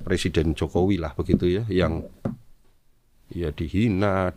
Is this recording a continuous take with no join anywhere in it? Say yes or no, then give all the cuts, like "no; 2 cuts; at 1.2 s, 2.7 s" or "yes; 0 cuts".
yes; 0 cuts